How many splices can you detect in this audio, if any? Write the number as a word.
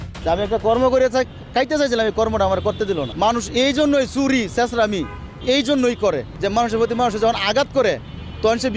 two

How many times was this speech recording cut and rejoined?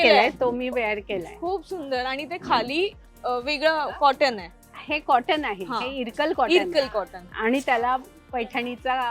zero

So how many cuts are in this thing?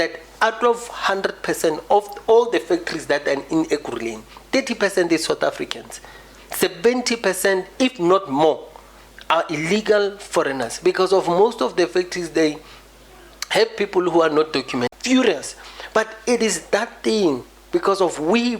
one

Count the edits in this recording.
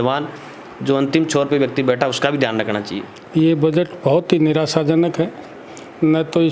one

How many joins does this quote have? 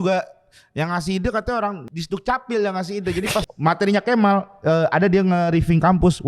two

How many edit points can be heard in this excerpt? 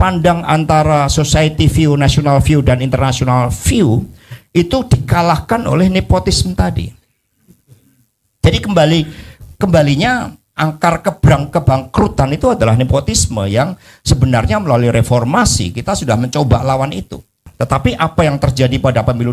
one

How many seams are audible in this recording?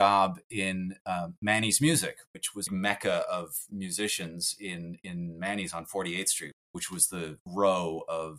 one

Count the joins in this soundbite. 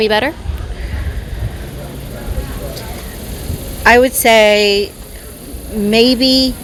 zero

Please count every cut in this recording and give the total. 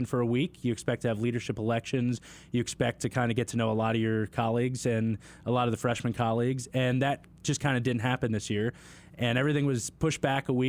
zero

